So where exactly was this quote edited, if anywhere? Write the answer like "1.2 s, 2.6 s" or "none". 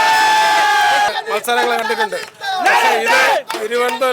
1.1 s